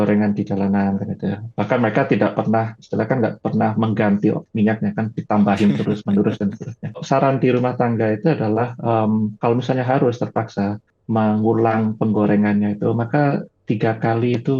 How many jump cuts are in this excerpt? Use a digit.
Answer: 2